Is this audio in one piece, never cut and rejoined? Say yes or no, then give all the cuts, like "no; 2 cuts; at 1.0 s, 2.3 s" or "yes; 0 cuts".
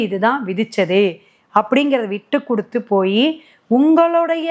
yes; 0 cuts